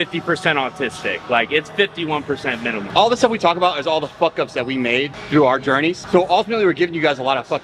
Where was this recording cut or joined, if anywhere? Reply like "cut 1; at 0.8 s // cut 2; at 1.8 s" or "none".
cut 1; at 2.8 s // cut 2; at 6.0 s

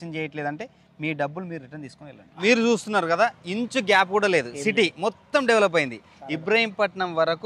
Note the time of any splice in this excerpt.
cut 1; at 2.2 s

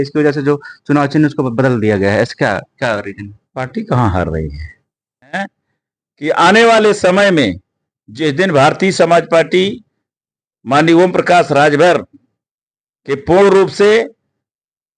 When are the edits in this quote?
cut 1; at 5.4 s

